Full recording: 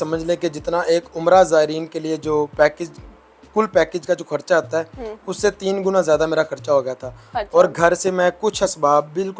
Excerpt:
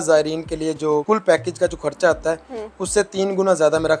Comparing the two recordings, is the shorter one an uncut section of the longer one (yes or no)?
no